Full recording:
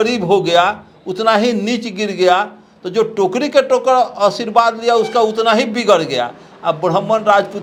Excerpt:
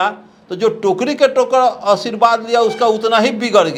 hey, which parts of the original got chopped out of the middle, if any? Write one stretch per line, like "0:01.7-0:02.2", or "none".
none